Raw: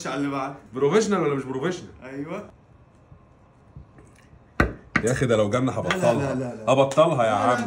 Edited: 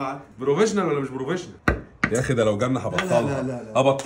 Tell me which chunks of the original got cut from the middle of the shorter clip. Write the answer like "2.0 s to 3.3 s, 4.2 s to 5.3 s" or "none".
1.9 s to 4.4 s